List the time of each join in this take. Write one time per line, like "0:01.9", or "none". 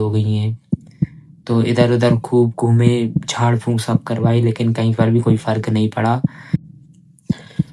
0:06.7